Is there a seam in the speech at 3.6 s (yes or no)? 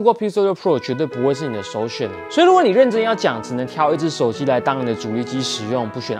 no